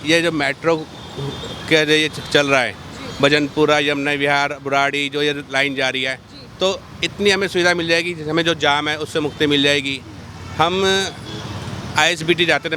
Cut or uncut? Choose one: uncut